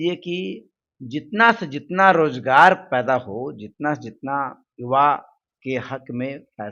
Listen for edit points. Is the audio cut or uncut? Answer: uncut